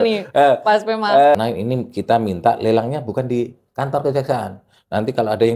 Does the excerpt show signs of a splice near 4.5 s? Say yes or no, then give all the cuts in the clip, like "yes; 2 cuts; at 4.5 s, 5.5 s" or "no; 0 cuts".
no; 1 cut; at 1.3 s